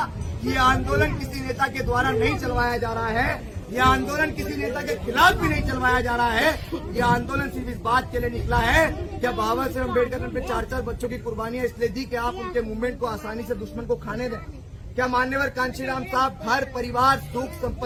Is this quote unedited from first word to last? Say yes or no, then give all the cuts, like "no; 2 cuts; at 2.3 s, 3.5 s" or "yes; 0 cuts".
yes; 0 cuts